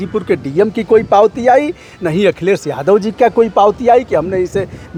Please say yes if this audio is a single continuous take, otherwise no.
yes